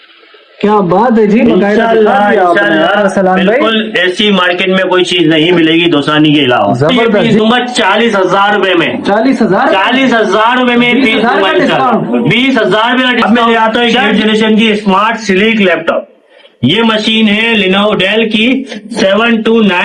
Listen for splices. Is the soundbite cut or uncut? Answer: cut